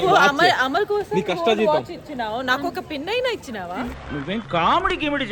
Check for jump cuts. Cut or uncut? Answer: uncut